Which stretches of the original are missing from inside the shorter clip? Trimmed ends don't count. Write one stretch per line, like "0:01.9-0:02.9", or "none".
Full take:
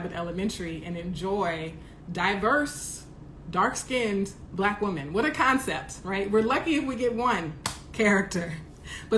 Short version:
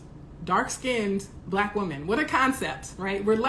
none